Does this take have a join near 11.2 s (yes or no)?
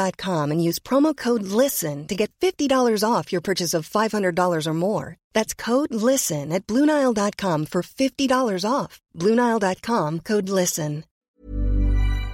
yes